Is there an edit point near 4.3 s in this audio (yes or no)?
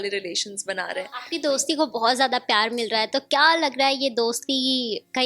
no